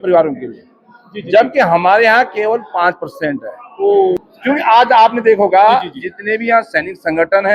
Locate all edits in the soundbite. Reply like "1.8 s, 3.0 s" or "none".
4.2 s